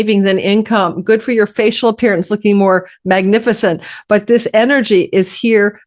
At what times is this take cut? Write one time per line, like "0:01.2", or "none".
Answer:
none